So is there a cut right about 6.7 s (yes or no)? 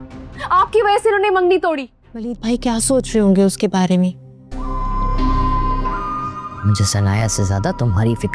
no